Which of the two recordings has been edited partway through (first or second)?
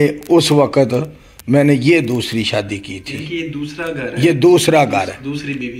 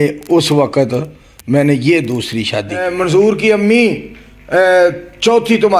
second